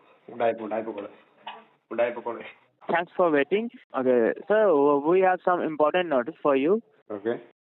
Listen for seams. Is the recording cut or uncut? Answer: cut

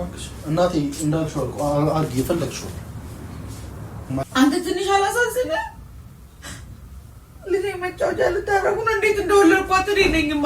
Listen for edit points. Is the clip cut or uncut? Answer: cut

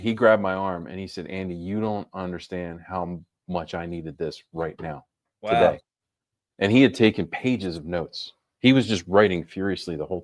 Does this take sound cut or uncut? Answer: uncut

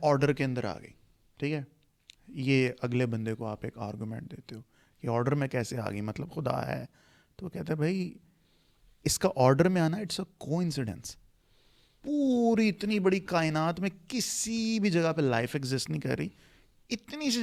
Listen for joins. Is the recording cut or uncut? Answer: uncut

